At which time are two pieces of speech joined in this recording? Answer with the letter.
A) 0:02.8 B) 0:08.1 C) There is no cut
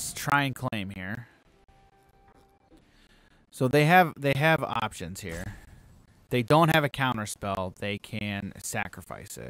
A